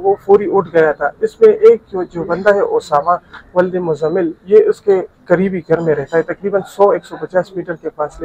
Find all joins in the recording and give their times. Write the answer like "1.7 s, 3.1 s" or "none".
none